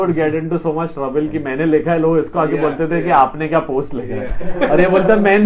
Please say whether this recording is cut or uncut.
uncut